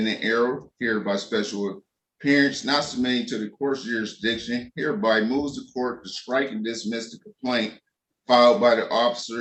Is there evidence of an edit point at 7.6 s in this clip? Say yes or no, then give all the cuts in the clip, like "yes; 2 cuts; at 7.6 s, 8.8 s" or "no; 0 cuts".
no; 0 cuts